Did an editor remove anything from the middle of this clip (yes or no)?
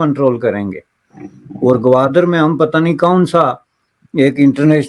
no